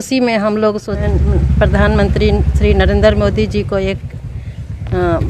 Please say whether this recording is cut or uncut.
cut